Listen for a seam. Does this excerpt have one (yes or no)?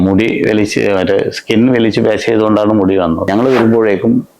yes